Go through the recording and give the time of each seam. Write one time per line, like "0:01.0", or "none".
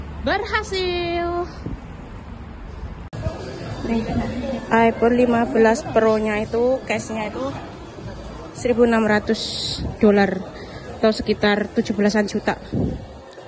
0:03.1